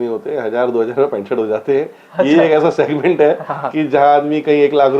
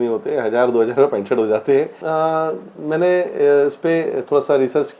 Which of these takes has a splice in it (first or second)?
second